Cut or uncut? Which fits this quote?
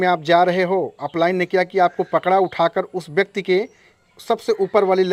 uncut